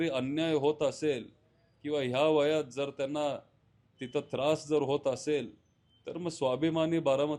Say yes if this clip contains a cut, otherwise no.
no